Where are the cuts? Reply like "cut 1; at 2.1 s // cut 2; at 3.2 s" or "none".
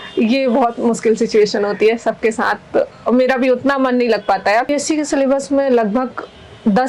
cut 1; at 4.7 s